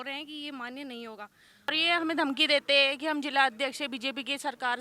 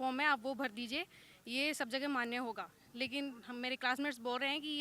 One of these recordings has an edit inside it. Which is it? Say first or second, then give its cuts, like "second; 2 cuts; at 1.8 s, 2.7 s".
first; 1 cut; at 1.7 s